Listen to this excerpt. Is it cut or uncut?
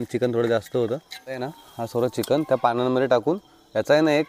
cut